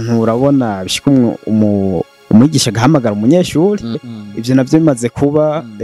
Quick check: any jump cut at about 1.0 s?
no; 1 cut; at 4.1 s

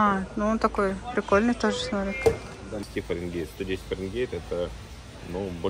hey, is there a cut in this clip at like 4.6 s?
no; 1 cut; at 2.8 s

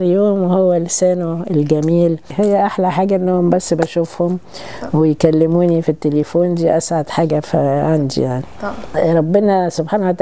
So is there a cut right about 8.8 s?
yes; 2 cuts; at 2.3 s, 8.8 s

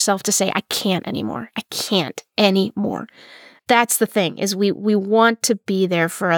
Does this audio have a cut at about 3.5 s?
yes; 1 cut; at 3.5 s

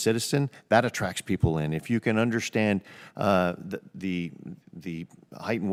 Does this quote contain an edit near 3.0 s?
no; 0 cuts

